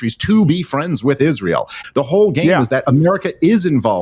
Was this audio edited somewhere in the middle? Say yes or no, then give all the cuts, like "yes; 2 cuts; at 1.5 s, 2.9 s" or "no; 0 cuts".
yes; 1 cut; at 1.8 s